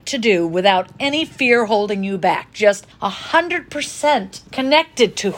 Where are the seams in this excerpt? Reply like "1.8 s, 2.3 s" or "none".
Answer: 4.4 s